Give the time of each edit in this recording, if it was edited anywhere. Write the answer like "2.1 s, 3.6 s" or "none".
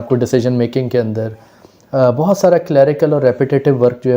none